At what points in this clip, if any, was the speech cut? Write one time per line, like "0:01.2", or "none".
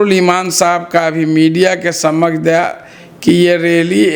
none